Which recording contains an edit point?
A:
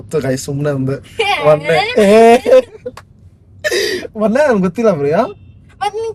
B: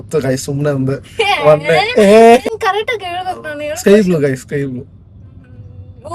B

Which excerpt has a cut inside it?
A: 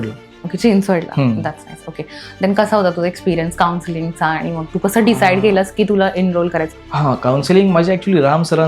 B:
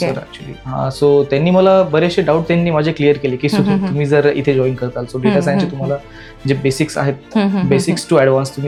A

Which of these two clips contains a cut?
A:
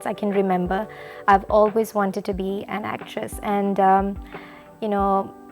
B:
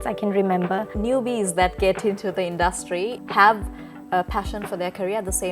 B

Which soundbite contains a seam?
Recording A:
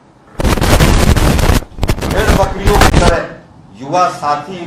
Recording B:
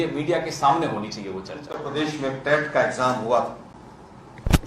B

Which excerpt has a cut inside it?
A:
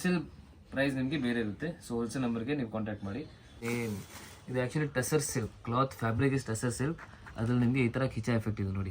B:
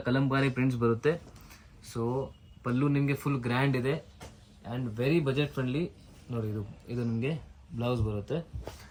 A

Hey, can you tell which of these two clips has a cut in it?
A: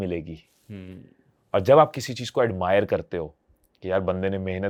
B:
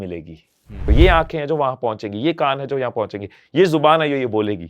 B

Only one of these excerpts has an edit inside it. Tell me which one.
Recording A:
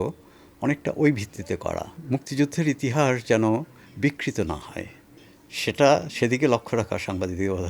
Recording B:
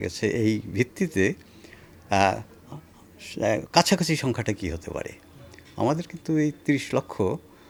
A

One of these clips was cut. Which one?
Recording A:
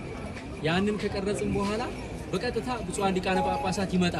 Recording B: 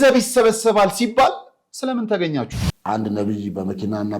B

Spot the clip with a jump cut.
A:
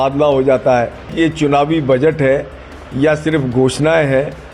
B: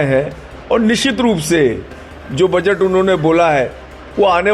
A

